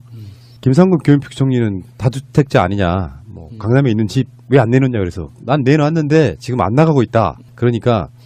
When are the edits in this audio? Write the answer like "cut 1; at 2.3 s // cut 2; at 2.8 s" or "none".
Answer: cut 1; at 4.1 s